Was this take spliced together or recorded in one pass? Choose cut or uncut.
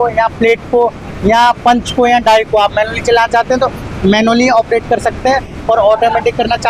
uncut